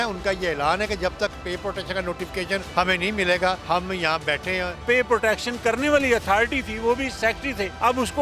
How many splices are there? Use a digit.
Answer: 4